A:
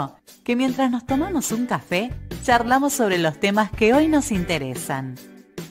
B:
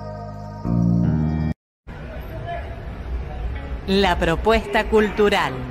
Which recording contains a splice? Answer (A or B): B